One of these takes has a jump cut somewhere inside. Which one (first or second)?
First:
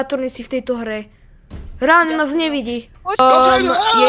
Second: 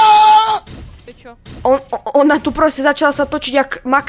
first